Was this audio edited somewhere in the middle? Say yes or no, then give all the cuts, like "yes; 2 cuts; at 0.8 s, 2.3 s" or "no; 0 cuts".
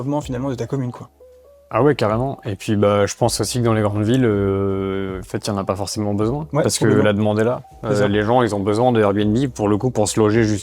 no; 0 cuts